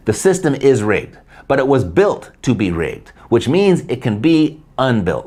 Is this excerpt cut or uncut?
uncut